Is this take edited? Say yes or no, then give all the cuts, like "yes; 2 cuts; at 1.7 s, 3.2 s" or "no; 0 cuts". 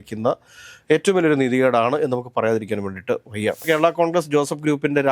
yes; 1 cut; at 3.6 s